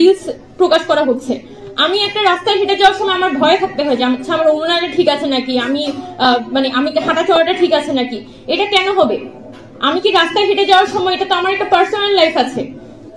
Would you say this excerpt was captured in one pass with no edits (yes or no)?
yes